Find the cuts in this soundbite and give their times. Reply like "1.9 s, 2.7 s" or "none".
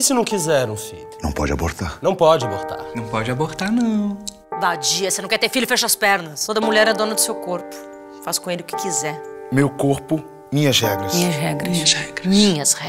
none